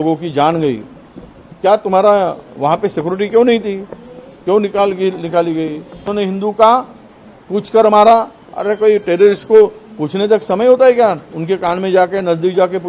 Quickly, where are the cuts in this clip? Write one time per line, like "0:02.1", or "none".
0:06.1